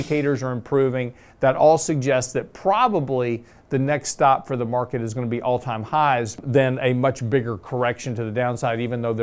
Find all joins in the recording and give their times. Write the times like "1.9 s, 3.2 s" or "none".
6.4 s